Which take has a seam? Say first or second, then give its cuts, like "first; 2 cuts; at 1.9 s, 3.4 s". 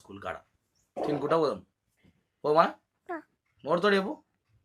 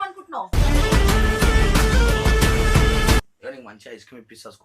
second; 1 cut; at 3.2 s